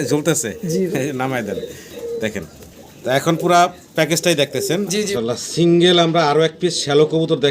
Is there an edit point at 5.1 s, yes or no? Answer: yes